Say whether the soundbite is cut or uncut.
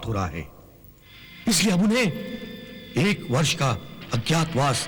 uncut